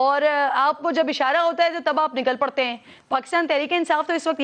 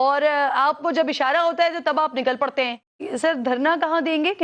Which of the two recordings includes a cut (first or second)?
second